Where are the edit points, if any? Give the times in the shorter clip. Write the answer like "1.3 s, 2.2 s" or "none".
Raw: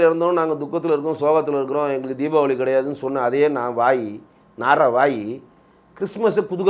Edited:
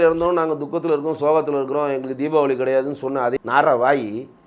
3.3 s